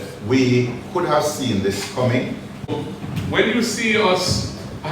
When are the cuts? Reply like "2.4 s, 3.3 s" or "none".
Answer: 2.7 s